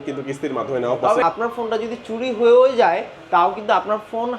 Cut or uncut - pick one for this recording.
cut